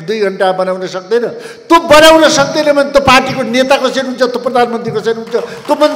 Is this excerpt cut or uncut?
uncut